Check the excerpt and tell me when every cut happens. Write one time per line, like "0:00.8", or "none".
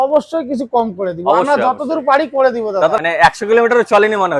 0:03.0